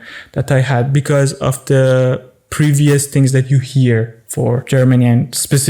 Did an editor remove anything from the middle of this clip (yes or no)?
yes